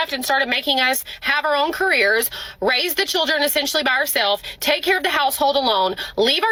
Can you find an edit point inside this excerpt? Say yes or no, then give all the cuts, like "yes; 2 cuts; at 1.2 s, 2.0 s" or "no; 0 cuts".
no; 0 cuts